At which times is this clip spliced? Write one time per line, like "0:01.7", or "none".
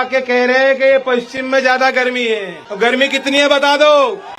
0:02.6